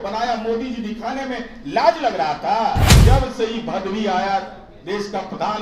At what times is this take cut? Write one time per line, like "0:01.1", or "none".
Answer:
0:02.9

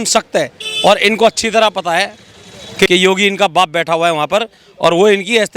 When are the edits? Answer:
0:02.9

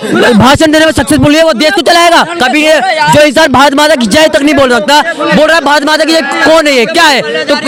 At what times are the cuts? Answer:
none

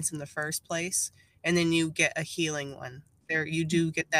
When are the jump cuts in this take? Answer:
0:03.1

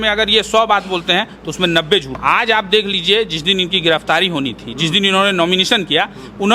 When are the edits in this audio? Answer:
0:02.1

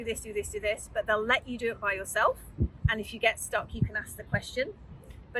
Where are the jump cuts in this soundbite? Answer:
none

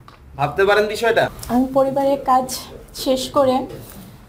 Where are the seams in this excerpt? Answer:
0:01.4

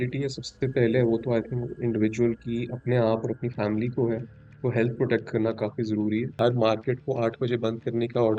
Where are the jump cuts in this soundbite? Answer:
0:06.3

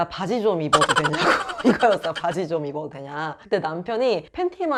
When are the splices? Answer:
none

